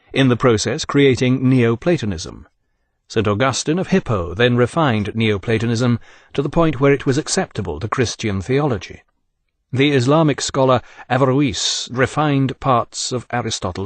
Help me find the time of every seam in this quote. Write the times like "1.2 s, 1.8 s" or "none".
2.4 s